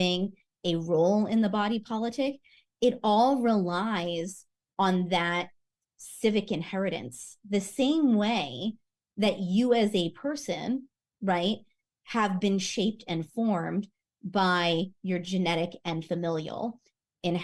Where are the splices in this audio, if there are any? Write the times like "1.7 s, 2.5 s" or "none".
none

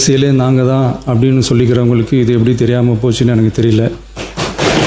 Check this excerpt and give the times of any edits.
none

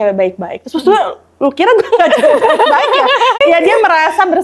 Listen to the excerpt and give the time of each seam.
3.4 s

